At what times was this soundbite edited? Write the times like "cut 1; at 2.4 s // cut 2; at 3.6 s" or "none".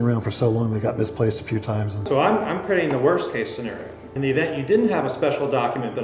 cut 1; at 2.1 s // cut 2; at 4.1 s